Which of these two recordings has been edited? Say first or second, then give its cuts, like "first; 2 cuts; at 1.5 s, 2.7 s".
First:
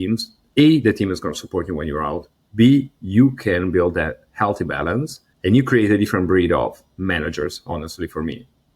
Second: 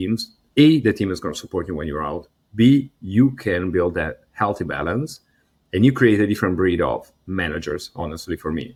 first; 1 cut; at 5.2 s